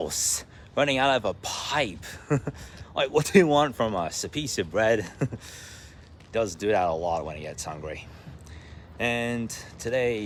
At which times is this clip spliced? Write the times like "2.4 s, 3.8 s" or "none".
none